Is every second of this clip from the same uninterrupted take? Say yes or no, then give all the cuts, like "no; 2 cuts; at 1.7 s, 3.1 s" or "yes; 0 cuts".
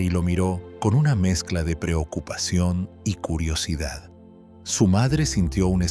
yes; 0 cuts